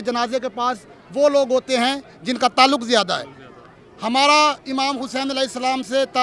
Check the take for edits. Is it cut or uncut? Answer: uncut